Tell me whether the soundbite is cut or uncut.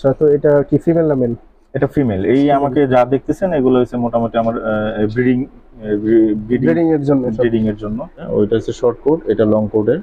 cut